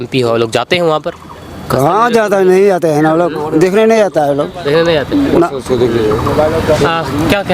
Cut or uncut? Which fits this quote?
uncut